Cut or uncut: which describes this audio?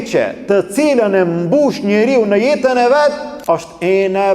cut